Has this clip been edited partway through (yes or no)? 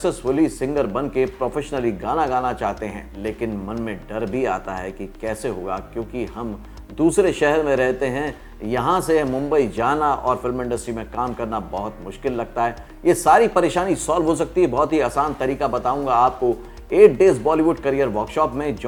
no